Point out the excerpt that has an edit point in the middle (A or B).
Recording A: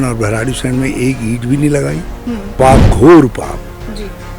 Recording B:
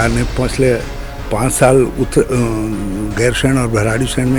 A